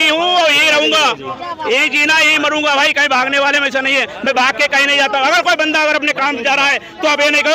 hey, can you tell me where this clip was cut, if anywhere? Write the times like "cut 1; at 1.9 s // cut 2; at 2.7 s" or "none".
none